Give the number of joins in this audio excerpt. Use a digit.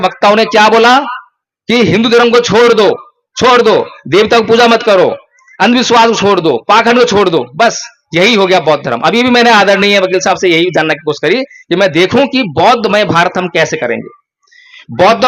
0